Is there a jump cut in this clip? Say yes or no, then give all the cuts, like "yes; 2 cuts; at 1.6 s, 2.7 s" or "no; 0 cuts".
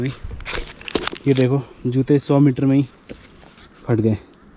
no; 0 cuts